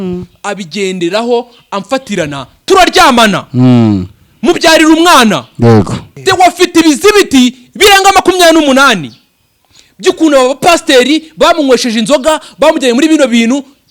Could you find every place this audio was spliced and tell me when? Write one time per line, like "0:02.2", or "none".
0:06.0